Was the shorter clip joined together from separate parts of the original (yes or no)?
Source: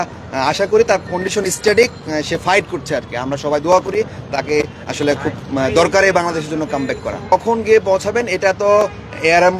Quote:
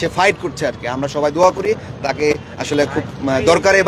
no